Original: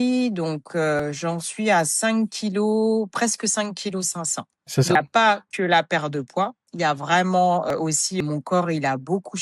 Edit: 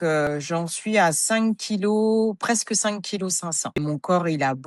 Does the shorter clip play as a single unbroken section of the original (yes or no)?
no